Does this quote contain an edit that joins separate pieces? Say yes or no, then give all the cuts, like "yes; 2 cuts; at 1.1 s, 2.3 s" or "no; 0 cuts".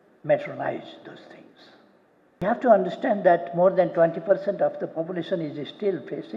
yes; 1 cut; at 2.4 s